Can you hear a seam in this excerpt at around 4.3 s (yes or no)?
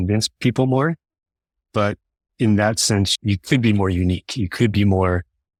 no